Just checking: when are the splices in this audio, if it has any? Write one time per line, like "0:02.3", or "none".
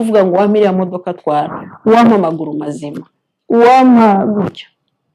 none